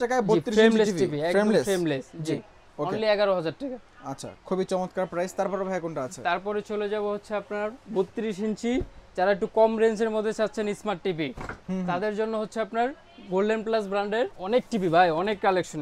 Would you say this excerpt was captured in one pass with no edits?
yes; 0 cuts

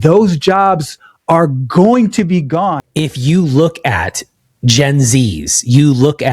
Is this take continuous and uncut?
no; 1 cut; at 2.8 s

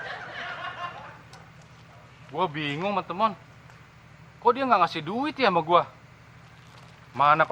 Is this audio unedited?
yes; 0 cuts

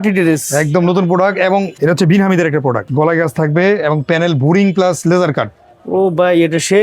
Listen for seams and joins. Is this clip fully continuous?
no; 2 cuts; at 1.7 s, 2.9 s

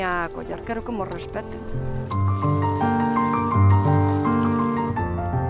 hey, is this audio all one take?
yes; 0 cuts

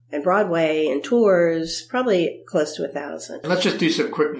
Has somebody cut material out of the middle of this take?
yes; 1 cut; at 3.4 s

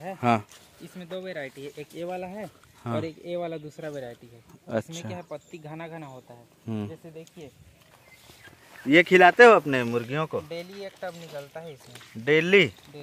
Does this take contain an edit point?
yes; 1 cut; at 7.9 s

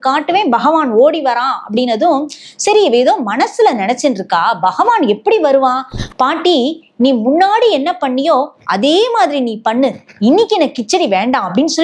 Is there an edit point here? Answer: yes; 1 cut; at 6.0 s

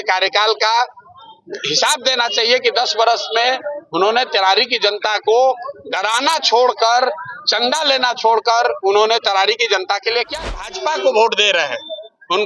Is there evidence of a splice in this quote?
yes; 1 cut; at 10.6 s

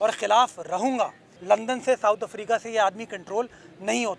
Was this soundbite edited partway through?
yes; 1 cut; at 1.3 s

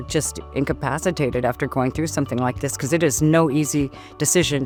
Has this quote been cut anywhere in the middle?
no; 0 cuts

